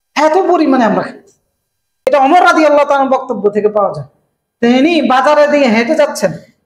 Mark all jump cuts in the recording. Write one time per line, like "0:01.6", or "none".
0:01.9